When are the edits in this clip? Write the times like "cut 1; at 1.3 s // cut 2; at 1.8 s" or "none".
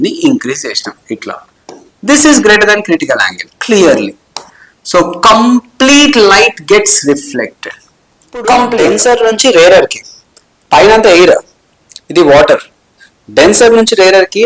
cut 1; at 8.8 s